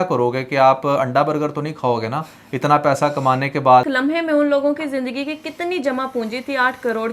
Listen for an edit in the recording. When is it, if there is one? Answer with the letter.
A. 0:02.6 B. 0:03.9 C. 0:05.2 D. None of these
B